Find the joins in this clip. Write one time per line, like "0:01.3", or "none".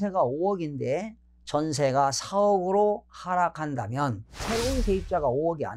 0:04.3